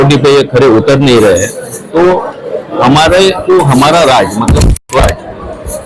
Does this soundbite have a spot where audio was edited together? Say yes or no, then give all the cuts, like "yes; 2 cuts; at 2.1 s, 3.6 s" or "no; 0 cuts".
no; 0 cuts